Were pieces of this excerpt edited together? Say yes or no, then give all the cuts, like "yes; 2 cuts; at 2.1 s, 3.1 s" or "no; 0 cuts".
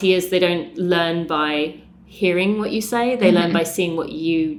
no; 0 cuts